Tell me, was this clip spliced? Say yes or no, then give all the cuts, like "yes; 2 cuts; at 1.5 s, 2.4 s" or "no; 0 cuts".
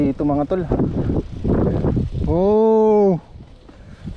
yes; 1 cut; at 1.0 s